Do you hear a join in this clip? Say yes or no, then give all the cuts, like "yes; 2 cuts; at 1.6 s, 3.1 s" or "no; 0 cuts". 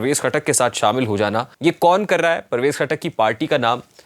yes; 1 cut; at 1.5 s